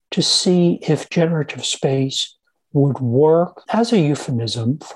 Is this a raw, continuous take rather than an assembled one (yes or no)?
no